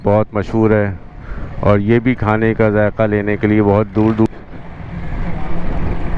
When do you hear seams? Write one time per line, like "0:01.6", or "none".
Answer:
0:04.3